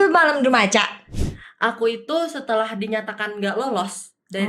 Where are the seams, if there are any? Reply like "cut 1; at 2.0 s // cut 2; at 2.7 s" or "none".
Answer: cut 1; at 1.1 s